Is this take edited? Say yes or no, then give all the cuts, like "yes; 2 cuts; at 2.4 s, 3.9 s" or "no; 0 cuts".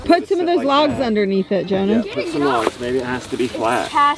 no; 0 cuts